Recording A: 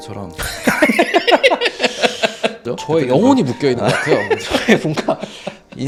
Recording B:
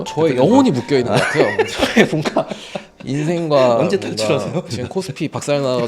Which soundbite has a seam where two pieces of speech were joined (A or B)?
B